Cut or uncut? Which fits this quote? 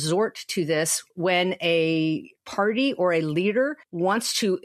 uncut